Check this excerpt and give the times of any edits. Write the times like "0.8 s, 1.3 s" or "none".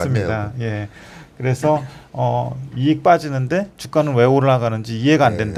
none